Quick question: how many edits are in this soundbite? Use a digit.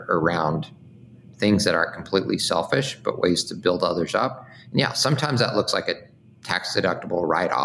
0